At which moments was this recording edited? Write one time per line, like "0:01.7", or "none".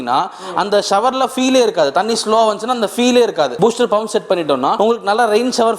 0:03.5
0:04.7

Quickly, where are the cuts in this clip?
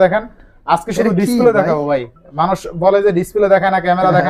none

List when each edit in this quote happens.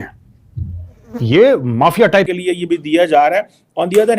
0:02.3

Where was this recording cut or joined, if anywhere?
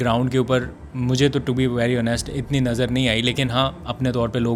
none

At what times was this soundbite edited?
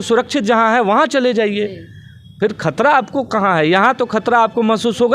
none

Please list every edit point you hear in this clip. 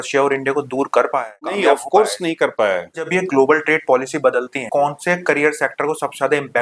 0:01.5
0:03.1
0:04.6

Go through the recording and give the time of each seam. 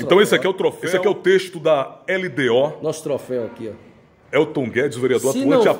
none

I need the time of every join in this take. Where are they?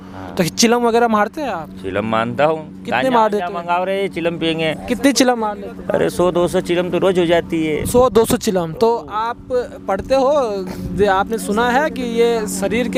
none

